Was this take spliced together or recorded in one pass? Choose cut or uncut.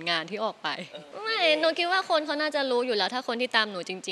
cut